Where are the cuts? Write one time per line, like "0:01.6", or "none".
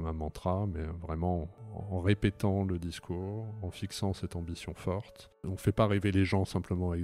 0:01.6
0:05.5